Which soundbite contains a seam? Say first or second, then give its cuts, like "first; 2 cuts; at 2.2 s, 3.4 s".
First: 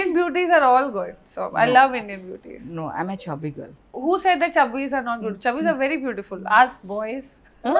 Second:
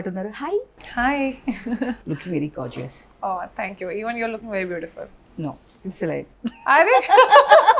first; 1 cut; at 3.9 s